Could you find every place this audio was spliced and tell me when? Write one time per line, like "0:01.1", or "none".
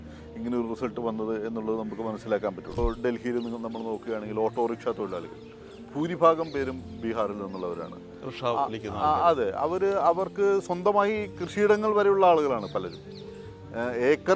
0:02.7